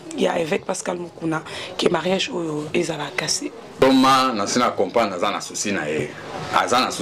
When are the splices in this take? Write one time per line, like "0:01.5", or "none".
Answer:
0:03.8